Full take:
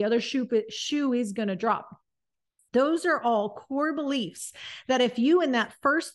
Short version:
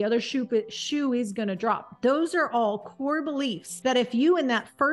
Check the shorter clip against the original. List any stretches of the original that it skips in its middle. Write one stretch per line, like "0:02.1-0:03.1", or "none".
0:01.9-0:02.6
0:04.4-0:04.7

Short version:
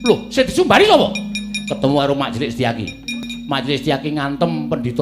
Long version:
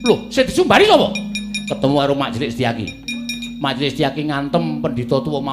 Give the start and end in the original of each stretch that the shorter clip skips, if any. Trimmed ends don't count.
0:03.3-0:03.4

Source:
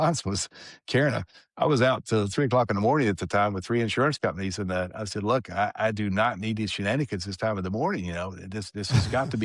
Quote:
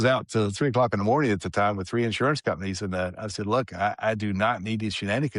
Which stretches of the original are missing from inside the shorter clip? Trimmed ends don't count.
none

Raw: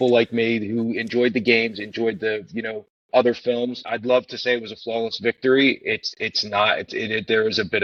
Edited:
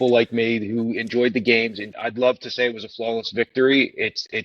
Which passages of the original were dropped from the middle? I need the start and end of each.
0:01.9-0:03.8

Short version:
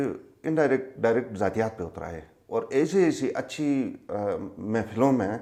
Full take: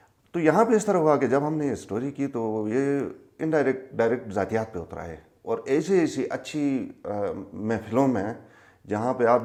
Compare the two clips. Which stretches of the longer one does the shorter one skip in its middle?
none

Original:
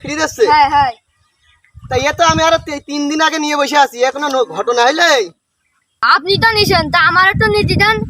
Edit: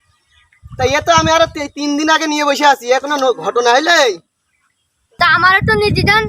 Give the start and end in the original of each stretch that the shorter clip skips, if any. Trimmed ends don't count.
0:06.2-0:06.9

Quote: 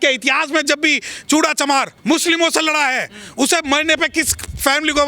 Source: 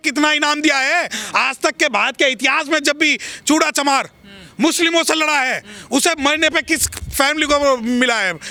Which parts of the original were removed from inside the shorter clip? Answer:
0:04.1-0:04.5

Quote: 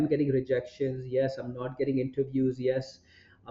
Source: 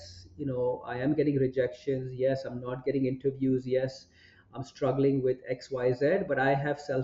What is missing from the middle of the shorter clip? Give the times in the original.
none

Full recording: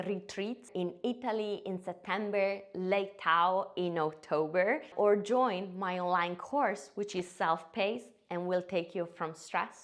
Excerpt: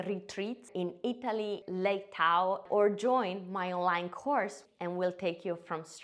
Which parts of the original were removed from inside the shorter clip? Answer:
0:01.6-0:02.7
0:03.7-0:04.9
0:06.9-0:08.1

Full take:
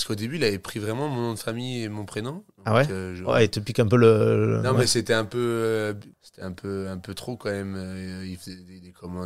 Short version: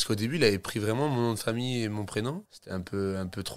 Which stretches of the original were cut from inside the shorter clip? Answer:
0:02.4-0:06.2

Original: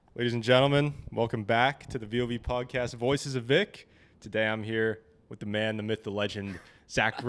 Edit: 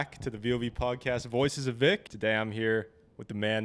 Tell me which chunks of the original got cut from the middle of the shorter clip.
0:03.8-0:04.2

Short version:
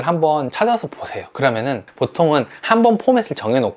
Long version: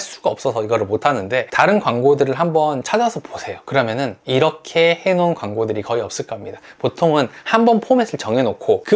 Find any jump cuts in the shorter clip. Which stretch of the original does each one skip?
0:04.2-0:06.7

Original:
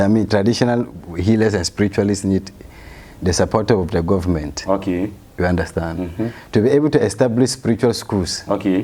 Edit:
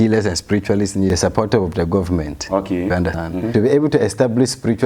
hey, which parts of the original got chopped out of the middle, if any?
0:02.4-0:03.3
0:05.4-0:06.2

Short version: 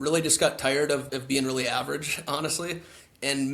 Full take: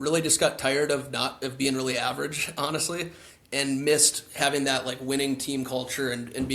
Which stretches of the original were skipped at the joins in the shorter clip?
0:01.1-0:01.4

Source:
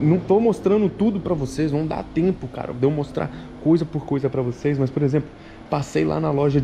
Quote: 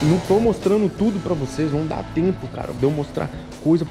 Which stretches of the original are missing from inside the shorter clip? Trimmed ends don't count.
none

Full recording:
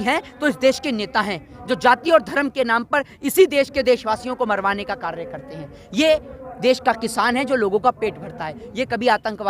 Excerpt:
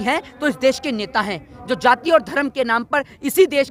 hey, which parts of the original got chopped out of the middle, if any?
none

